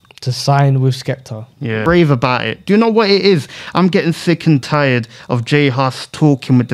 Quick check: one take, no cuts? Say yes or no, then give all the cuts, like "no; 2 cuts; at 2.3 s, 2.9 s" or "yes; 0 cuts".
no; 1 cut; at 1.8 s